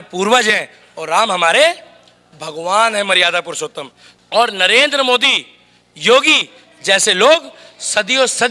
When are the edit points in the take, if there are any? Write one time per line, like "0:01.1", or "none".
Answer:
0:04.3